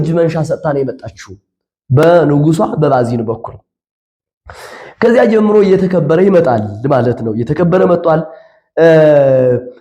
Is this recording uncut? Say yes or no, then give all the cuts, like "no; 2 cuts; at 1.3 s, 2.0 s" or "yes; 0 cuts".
yes; 0 cuts